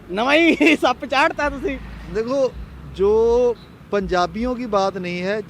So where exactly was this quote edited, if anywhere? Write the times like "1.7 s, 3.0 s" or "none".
none